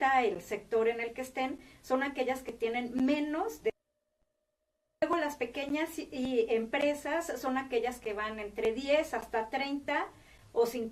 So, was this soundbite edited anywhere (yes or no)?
yes